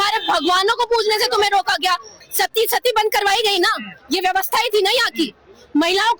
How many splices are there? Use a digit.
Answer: 1